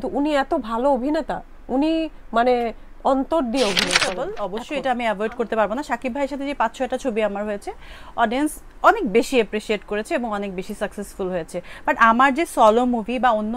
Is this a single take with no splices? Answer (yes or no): no